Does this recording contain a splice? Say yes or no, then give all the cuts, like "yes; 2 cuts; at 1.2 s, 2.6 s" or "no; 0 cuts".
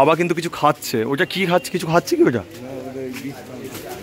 no; 0 cuts